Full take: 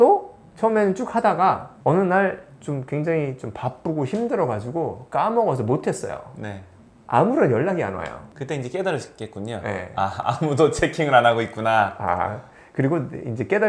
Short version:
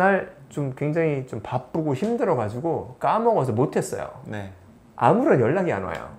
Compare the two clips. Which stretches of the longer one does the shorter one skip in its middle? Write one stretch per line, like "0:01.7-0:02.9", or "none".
none